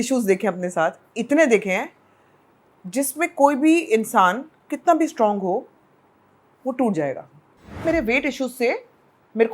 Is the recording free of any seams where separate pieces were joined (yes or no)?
no